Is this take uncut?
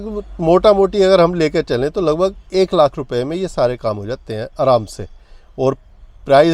yes; 0 cuts

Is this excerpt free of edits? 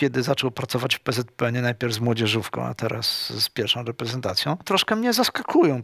no; 1 cut; at 4.6 s

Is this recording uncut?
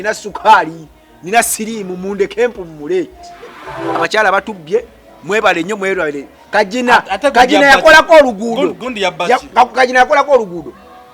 no; 1 cut; at 4.0 s

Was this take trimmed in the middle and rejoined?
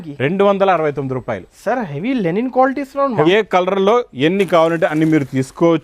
yes; 1 cut; at 3.2 s

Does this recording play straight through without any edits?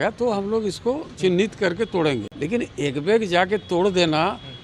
yes; 0 cuts

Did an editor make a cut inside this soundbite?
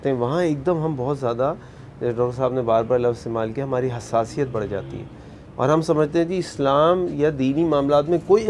no; 0 cuts

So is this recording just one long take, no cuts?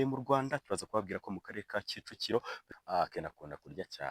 no; 1 cut; at 2.6 s

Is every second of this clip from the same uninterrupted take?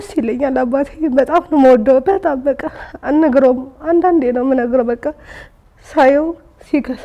yes; 0 cuts

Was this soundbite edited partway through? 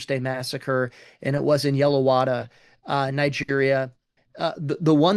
no; 0 cuts

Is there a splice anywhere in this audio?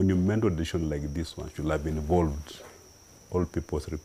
no; 0 cuts

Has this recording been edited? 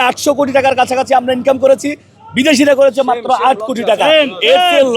no; 0 cuts

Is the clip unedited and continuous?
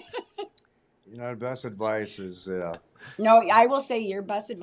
yes; 0 cuts

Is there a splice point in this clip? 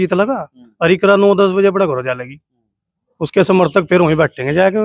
no; 0 cuts

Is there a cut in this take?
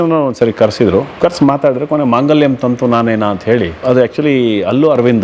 yes; 2 cuts; at 1.1 s, 3.8 s

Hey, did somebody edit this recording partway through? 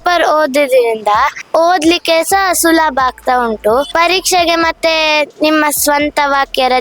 yes; 2 cuts; at 1.4 s, 3.9 s

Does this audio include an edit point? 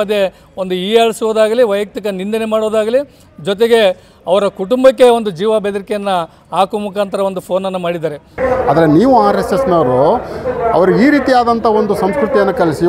yes; 1 cut; at 8.4 s

